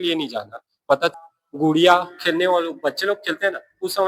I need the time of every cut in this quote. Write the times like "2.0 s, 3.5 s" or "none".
1.1 s